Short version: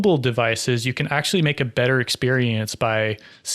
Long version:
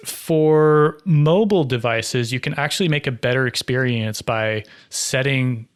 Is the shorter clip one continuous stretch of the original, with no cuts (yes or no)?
yes